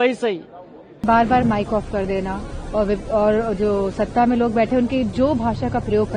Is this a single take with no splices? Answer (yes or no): no